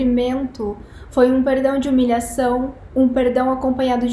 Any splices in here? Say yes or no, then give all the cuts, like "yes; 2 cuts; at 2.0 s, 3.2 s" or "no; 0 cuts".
no; 0 cuts